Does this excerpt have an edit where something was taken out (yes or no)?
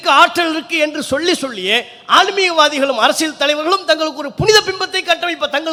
no